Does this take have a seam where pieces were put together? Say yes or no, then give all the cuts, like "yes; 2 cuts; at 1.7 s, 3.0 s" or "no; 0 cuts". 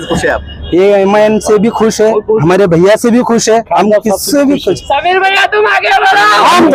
no; 0 cuts